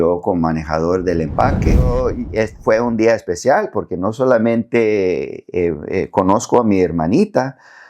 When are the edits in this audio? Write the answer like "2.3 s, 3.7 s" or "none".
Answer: 1.9 s